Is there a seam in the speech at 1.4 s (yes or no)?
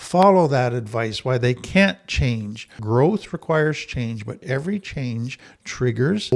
no